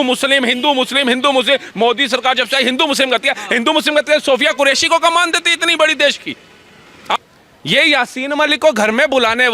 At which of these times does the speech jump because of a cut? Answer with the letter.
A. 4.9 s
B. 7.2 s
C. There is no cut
B